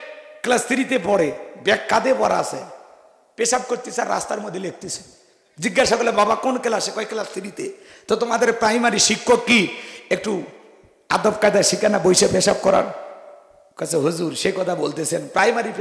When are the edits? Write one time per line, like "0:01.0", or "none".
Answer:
none